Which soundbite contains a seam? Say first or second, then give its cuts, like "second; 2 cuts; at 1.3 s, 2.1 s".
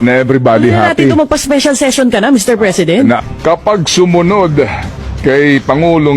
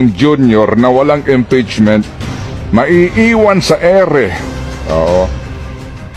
first; 1 cut; at 3.2 s